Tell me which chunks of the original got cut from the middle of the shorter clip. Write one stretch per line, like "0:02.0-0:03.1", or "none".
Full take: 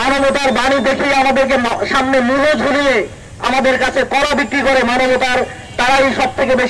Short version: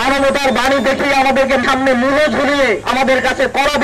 0:01.6-0:01.9
0:03.1-0:03.4